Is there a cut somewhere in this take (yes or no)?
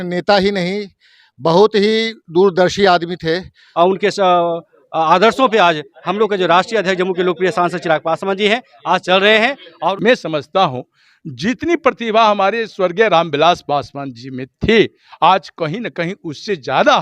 yes